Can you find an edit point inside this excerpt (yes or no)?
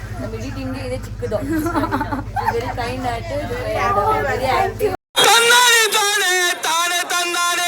yes